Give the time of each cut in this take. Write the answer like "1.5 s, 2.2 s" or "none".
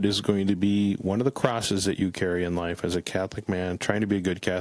none